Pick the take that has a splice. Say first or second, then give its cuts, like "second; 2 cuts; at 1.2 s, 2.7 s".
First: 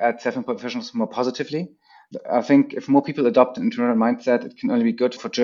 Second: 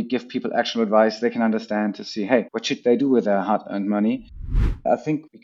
second; 2 cuts; at 2.6 s, 4.5 s